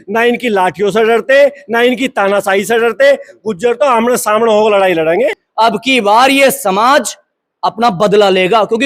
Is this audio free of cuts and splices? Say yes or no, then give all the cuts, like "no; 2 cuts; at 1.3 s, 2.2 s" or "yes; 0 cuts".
no; 1 cut; at 5.4 s